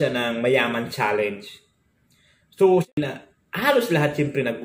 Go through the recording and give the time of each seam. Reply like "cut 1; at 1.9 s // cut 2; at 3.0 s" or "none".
cut 1; at 2.9 s